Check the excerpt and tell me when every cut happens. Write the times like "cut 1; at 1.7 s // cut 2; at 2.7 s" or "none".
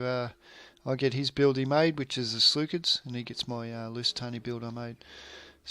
cut 1; at 1.0 s